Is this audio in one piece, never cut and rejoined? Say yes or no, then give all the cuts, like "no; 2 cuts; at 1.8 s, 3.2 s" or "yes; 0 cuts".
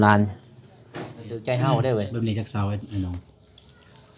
no; 1 cut; at 1.3 s